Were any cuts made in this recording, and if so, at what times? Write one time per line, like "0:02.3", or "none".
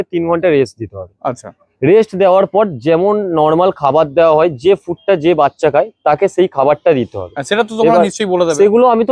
none